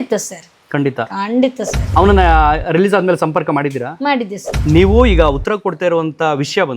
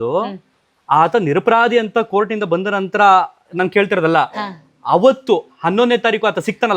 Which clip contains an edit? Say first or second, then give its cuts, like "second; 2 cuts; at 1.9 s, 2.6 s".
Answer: first; 2 cuts; at 1.8 s, 4.4 s